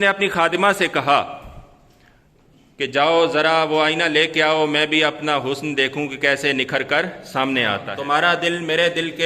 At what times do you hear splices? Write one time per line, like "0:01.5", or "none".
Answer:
0:07.9